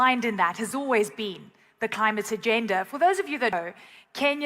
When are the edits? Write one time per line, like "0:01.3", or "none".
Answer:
0:03.5